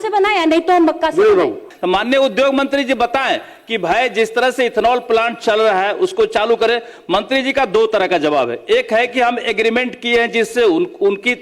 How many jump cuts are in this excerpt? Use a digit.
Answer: 1